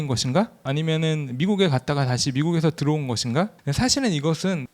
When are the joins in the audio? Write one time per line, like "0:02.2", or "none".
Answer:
0:03.6